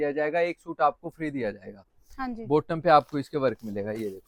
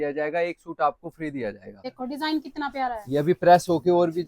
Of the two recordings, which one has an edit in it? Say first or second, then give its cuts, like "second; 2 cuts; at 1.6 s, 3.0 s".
second; 1 cut; at 1.8 s